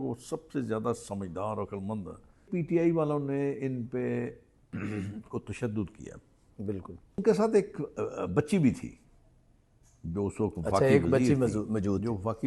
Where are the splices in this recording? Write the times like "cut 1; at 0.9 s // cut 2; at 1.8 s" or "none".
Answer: cut 1; at 2.5 s // cut 2; at 7.2 s